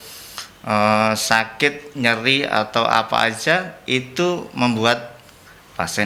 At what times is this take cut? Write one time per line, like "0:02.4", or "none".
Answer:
none